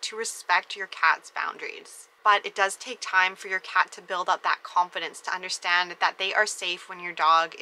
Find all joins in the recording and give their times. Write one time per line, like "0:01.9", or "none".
0:02.1

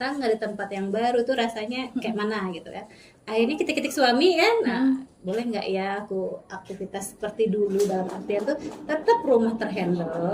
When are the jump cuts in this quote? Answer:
none

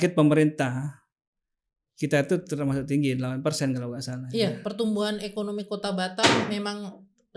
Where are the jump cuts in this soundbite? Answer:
none

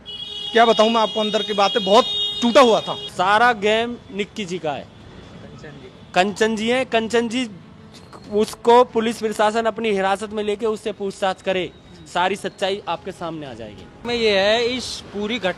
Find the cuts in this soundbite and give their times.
0:03.0
0:14.0

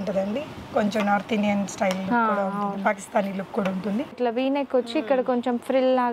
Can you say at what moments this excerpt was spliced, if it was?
0:04.2

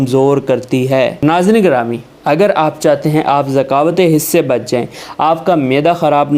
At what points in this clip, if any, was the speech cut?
0:01.2

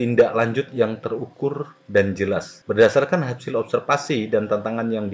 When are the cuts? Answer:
0:02.5

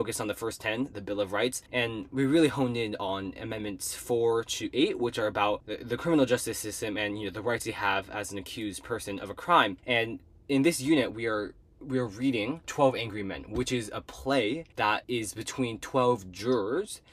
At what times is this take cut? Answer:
0:01.6
0:05.7
0:09.8
0:12.7
0:14.9

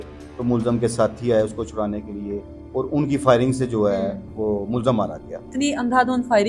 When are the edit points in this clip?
0:05.5

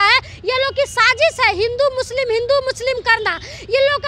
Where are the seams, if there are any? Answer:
none

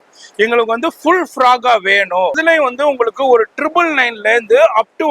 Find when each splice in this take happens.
0:02.4

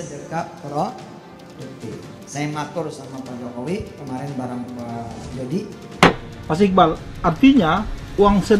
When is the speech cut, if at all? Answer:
0:05.8

